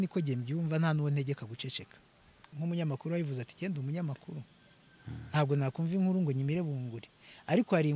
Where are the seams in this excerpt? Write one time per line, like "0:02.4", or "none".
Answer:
0:02.4